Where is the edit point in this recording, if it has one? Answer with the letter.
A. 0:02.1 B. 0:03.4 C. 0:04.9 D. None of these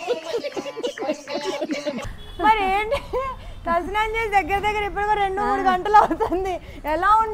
A